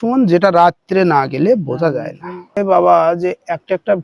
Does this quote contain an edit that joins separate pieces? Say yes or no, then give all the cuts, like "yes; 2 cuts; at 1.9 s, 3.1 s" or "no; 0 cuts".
yes; 1 cut; at 2.6 s